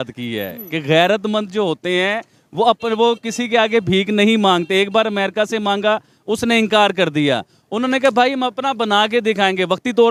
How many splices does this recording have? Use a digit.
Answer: 0